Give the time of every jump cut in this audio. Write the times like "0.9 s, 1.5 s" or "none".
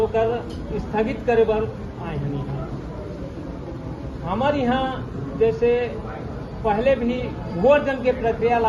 none